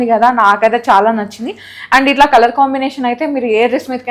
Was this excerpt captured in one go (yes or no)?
yes